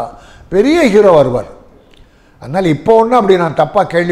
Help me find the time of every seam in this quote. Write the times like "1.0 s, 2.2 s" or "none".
none